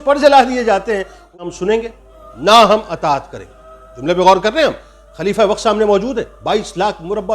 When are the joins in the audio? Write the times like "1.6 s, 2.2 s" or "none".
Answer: 1.4 s

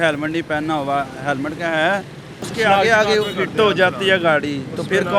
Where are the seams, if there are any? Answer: 2.4 s

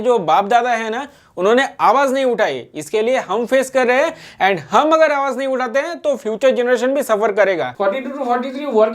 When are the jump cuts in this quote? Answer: 7.7 s

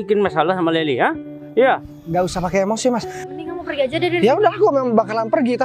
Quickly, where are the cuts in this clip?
3.2 s

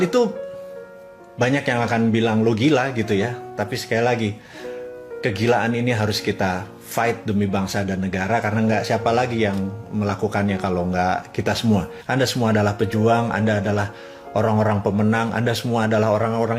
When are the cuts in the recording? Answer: 12.0 s

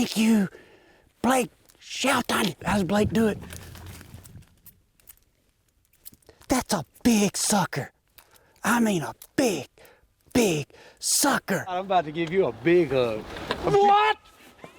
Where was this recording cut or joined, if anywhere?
2.7 s, 11.8 s

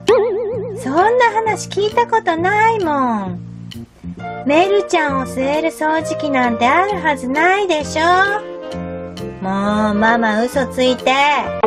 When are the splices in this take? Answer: none

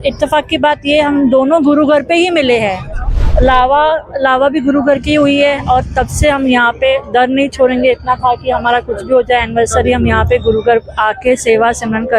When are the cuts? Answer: 3.2 s

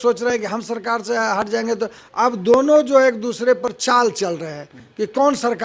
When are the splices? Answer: none

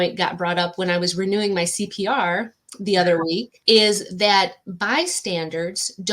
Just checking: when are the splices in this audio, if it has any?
3.5 s

